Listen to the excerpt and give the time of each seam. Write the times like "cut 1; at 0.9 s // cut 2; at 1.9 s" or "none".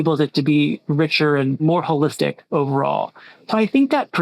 cut 1; at 1.6 s